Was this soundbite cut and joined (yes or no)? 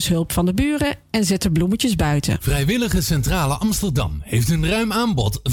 yes